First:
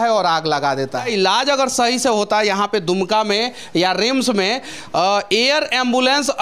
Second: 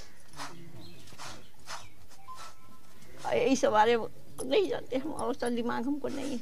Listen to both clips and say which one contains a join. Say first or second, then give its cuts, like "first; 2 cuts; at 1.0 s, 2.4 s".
first; 1 cut; at 1.1 s